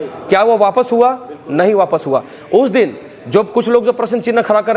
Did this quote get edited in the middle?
no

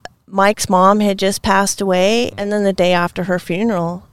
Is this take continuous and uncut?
no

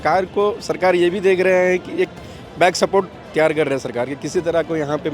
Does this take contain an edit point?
no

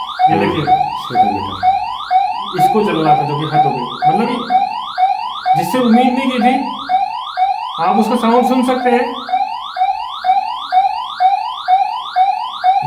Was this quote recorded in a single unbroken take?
yes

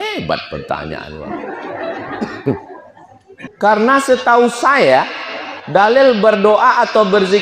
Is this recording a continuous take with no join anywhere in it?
no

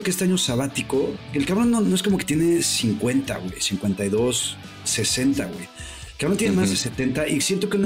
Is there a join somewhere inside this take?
no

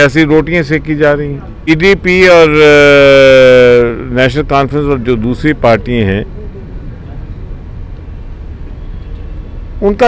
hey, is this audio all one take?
no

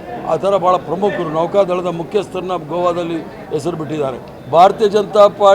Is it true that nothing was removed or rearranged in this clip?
no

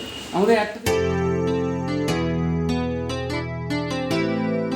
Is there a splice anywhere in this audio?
yes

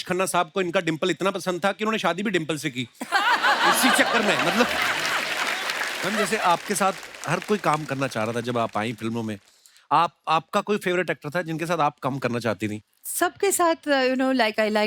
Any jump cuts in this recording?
yes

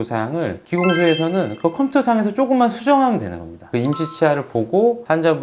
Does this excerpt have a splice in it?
yes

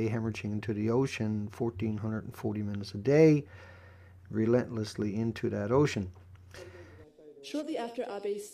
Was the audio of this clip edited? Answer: no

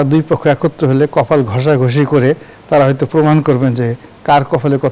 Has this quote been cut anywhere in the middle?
no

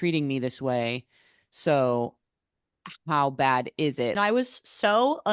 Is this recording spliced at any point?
yes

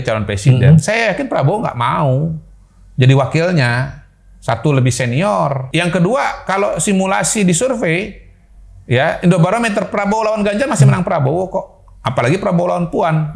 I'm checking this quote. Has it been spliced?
yes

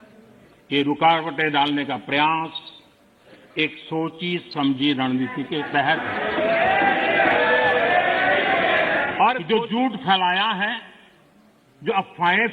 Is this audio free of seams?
no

